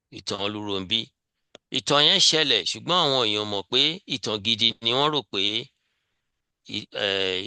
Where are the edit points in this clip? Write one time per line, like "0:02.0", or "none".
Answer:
none